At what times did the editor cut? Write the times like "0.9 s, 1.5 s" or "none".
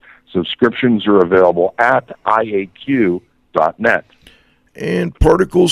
4.3 s